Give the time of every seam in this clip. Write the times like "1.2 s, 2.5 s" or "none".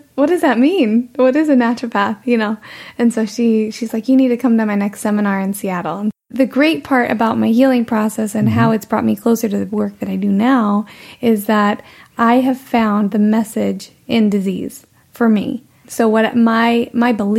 6.2 s, 15.9 s